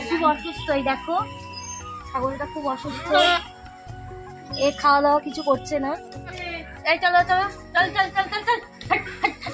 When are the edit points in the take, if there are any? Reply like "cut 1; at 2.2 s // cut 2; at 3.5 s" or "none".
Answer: cut 1; at 6.4 s